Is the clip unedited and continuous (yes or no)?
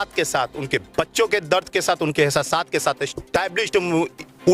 yes